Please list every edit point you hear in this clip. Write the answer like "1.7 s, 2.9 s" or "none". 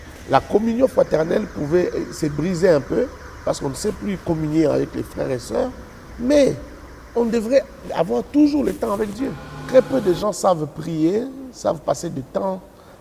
9.5 s